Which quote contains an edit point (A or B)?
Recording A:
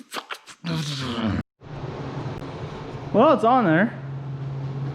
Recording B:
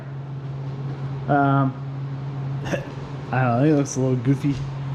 A